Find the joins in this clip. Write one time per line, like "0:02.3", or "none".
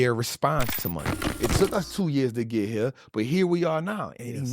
0:01.3